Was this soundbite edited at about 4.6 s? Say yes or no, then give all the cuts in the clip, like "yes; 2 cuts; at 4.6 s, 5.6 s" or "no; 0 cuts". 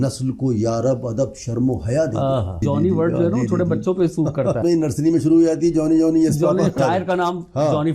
yes; 3 cuts; at 2.6 s, 4.6 s, 6.8 s